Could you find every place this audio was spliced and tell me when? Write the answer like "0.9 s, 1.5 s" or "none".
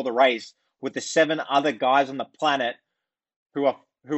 none